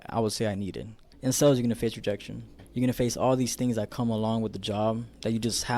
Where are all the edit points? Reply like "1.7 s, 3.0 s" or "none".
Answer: 1.1 s

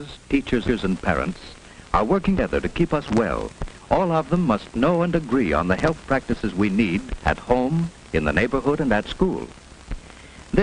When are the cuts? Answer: 8.3 s

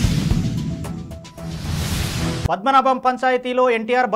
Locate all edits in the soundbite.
2.5 s

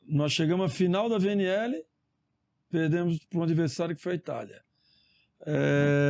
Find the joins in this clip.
none

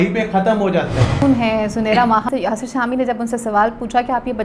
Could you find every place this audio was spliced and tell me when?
1.2 s, 2.3 s

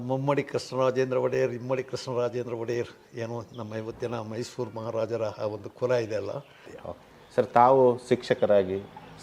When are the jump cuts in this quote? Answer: 6.7 s

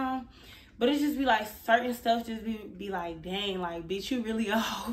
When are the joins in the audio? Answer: none

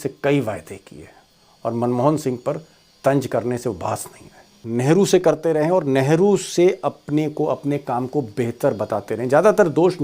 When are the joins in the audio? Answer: 4.6 s

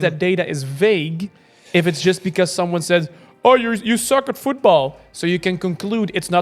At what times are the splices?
none

